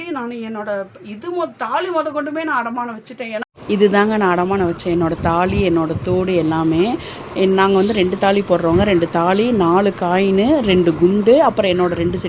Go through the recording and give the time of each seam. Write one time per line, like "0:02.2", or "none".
none